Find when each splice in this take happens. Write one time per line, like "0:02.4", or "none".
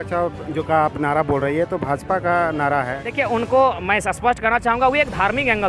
0:03.0